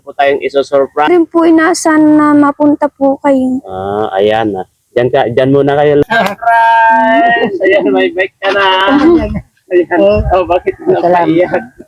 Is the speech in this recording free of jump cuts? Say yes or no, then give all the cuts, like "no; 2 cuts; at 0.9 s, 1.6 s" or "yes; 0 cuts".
no; 2 cuts; at 1.1 s, 6.0 s